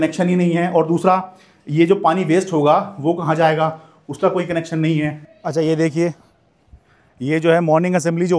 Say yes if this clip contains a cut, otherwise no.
no